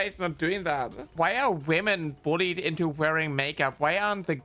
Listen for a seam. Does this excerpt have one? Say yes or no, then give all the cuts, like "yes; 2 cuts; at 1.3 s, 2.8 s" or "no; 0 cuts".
yes; 1 cut; at 1.1 s